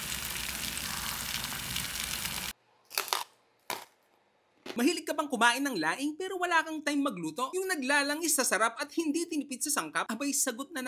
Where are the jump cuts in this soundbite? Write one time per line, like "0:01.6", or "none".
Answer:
0:02.5